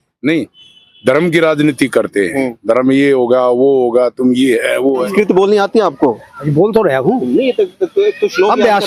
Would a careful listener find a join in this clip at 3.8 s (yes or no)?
no